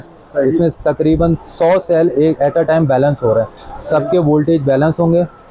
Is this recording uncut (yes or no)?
yes